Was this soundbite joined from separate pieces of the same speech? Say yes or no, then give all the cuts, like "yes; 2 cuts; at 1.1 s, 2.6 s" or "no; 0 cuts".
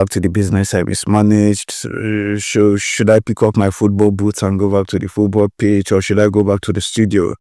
no; 0 cuts